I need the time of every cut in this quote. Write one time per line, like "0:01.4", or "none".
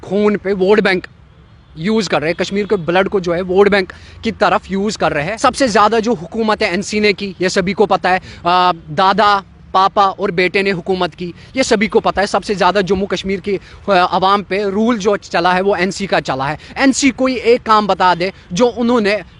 0:05.3